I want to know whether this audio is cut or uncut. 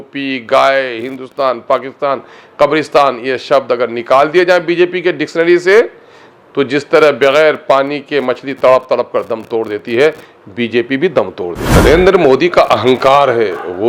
cut